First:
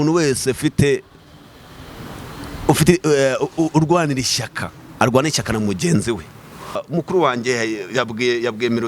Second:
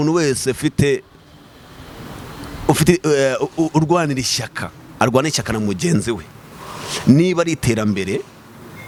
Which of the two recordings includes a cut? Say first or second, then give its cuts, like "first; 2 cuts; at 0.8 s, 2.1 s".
first; 1 cut; at 6.8 s